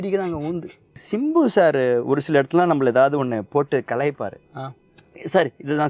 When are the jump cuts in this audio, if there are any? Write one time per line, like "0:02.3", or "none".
0:01.0